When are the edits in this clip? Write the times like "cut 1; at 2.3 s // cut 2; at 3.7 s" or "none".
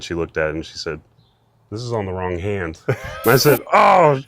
none